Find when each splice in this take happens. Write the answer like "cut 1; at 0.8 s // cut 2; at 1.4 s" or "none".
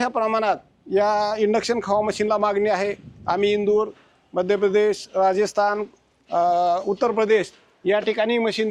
none